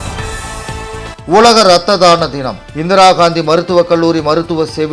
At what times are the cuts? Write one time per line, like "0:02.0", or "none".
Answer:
0:01.2